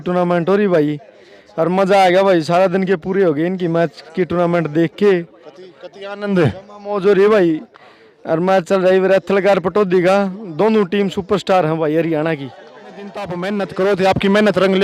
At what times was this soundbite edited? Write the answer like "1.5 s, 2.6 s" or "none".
13.2 s